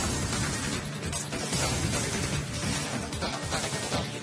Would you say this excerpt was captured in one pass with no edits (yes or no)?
yes